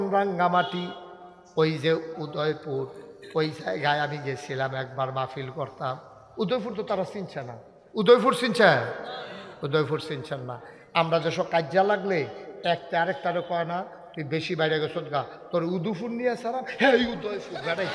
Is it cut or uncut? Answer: cut